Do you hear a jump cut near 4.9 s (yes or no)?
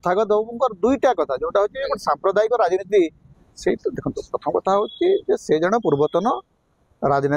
no